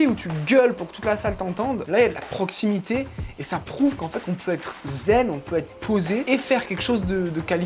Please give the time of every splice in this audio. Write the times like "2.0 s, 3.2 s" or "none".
6.2 s